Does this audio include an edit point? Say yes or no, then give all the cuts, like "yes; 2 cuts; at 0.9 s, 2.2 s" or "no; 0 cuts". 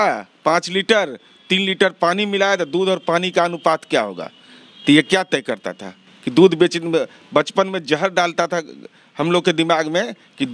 no; 0 cuts